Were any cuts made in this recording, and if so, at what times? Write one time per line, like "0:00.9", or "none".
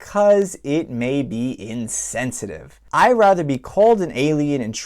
0:02.8